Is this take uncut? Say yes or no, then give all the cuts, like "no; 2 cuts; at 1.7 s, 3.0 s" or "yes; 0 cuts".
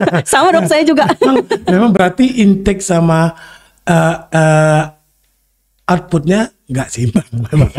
yes; 0 cuts